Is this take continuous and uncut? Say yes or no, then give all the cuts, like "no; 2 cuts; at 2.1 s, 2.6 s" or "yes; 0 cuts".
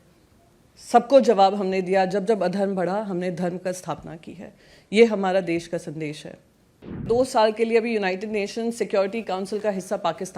no; 1 cut; at 7.0 s